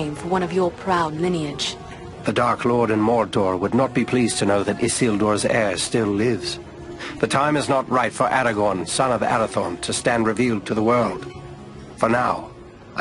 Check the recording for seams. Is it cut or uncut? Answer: cut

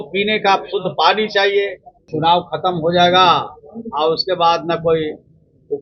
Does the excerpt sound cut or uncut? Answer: cut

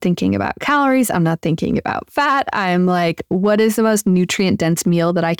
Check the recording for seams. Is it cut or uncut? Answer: uncut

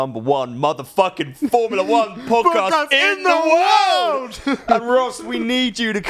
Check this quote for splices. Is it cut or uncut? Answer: uncut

